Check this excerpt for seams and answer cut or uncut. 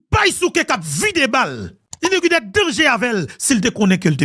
uncut